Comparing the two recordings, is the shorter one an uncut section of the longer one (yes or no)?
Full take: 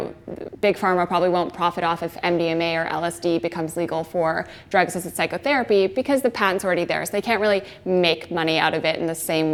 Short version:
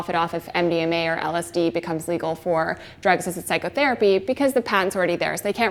yes